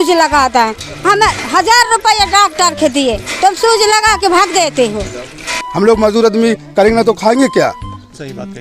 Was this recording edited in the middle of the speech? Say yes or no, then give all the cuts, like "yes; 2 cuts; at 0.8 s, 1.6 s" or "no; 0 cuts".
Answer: yes; 1 cut; at 5.5 s